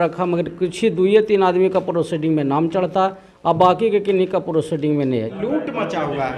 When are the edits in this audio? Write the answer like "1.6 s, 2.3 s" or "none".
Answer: 5.3 s